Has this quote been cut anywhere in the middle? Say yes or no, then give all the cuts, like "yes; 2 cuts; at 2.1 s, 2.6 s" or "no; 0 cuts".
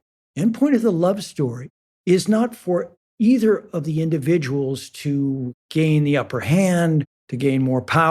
yes; 1 cut; at 3.0 s